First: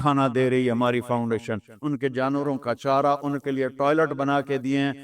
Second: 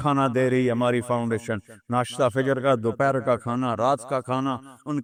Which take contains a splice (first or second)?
first